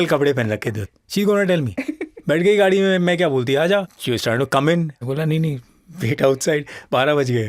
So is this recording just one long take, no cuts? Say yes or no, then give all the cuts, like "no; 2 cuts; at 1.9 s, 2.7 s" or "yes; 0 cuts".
no; 2 cuts; at 0.8 s, 4.0 s